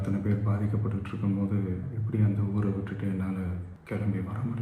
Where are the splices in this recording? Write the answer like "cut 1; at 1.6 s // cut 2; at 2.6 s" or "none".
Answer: cut 1; at 3.7 s